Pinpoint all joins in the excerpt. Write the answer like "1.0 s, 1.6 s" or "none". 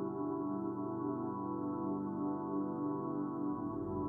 none